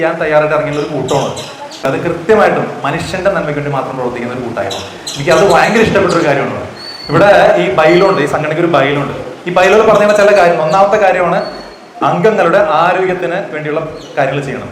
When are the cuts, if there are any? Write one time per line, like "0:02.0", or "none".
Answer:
none